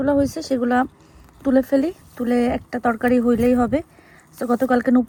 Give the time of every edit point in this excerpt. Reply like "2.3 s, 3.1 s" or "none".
none